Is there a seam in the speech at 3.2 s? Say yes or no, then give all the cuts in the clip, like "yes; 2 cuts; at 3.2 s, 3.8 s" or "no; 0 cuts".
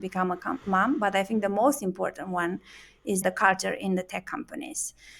yes; 1 cut; at 3.2 s